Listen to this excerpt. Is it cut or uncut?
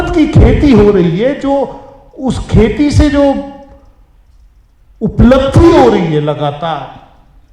uncut